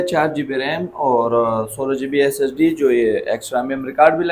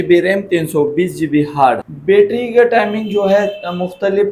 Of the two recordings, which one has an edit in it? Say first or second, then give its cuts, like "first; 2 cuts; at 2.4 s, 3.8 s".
second; 1 cut; at 1.8 s